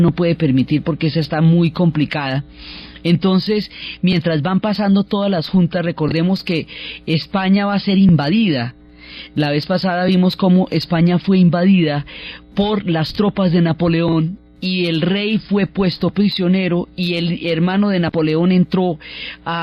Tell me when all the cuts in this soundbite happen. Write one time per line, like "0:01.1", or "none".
0:06.9

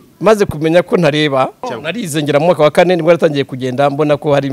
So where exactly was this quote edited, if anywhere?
0:01.7

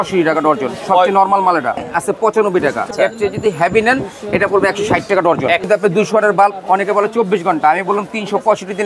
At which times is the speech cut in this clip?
0:01.8
0:02.9
0:05.7

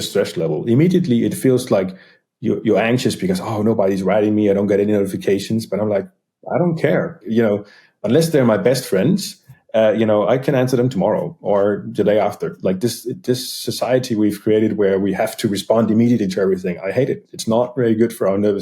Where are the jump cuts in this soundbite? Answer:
0:07.2
0:17.3

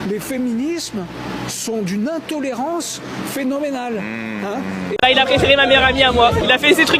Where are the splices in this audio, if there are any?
0:05.0

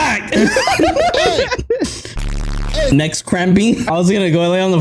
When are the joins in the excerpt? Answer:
0:03.9

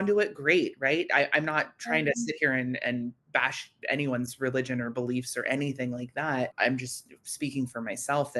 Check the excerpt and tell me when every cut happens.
0:03.2
0:06.5

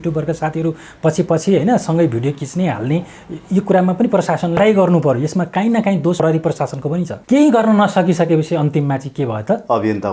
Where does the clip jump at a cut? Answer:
0:04.6
0:06.2
0:07.1

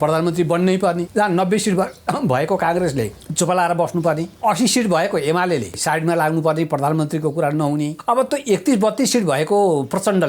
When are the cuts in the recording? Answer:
0:01.1
0:03.2
0:04.3
0:05.8
0:08.0

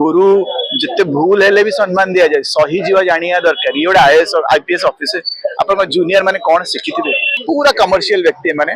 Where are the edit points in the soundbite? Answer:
0:07.4

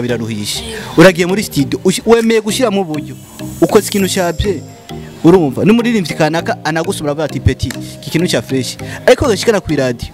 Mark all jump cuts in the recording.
none

